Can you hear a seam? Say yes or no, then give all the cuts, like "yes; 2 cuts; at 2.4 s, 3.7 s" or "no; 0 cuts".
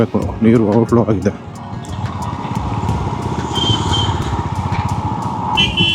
no; 0 cuts